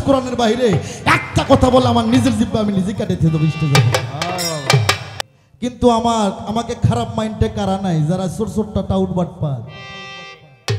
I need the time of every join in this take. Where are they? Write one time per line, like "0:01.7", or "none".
0:05.1